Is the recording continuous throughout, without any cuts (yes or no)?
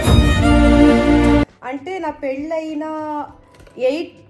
no